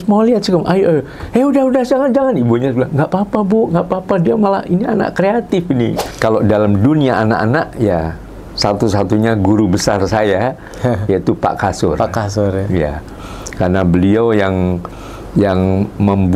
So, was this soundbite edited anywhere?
yes; 1 cut; at 6.0 s

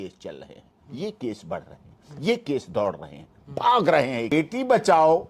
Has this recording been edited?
yes; 1 cut; at 4.3 s

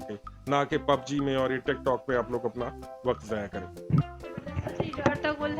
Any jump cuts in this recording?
no; 0 cuts

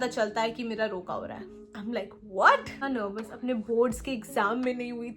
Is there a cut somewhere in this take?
yes; 1 cut; at 2.8 s

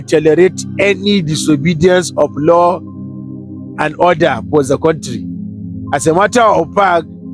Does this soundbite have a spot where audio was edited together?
no; 0 cuts

